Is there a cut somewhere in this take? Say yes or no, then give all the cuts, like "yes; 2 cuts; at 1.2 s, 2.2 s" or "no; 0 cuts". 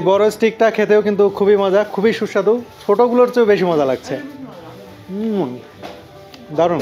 no; 0 cuts